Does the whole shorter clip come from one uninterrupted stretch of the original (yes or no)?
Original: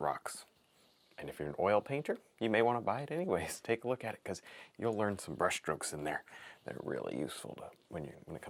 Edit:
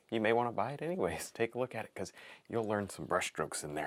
yes